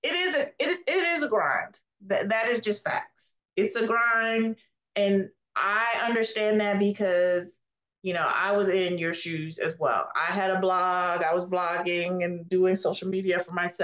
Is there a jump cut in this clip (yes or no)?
no